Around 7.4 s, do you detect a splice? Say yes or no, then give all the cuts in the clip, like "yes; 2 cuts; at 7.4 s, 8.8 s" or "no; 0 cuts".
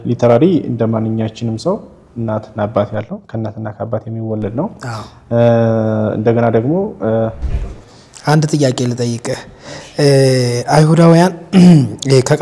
yes; 1 cut; at 7.4 s